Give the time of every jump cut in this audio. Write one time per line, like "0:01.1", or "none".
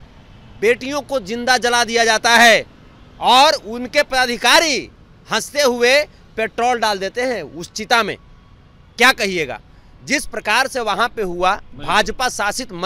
none